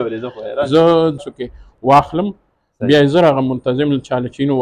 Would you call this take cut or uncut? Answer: cut